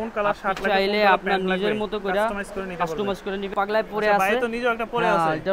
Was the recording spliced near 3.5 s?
yes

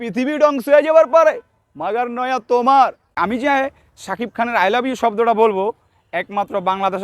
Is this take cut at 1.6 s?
no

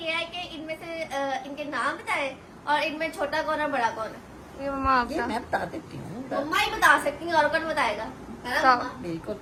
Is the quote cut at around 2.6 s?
no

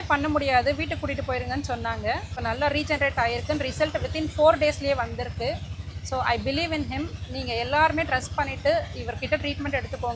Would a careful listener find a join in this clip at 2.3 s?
yes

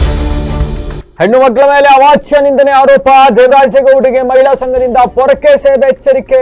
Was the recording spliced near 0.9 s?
yes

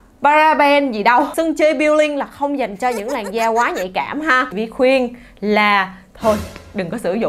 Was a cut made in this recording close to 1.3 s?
yes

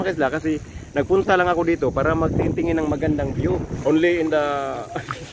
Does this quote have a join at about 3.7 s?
yes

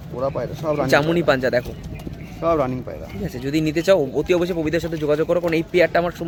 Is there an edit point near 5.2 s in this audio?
no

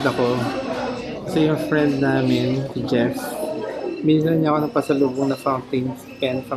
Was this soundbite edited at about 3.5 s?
no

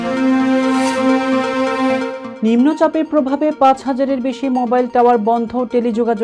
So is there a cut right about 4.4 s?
no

